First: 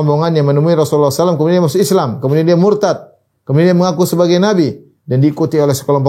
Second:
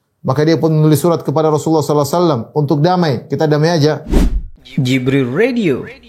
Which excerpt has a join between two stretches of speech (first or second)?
second